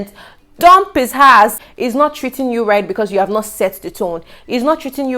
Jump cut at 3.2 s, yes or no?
no